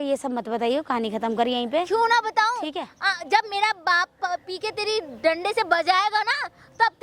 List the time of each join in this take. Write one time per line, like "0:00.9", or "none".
none